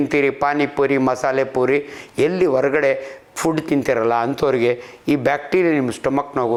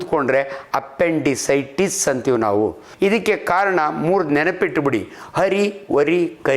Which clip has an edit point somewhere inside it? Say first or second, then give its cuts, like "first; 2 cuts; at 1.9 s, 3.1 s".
second; 1 cut; at 2.8 s